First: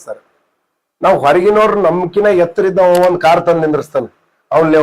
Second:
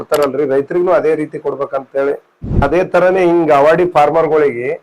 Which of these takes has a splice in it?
second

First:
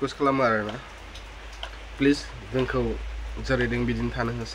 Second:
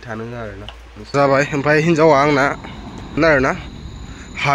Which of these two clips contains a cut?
second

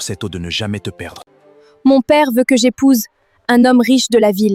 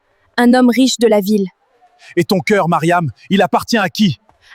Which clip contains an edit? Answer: first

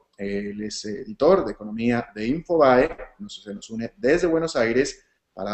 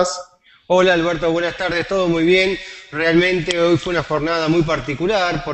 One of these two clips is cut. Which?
second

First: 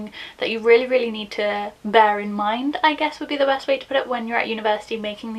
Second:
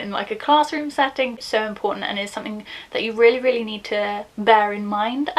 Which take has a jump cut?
second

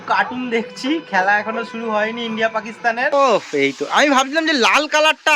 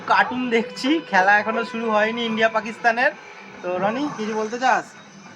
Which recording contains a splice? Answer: first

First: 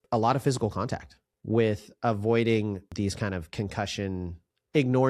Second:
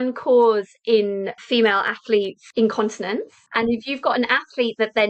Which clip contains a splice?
second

